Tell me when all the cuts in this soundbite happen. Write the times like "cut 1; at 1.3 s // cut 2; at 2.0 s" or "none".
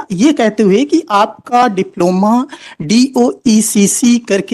none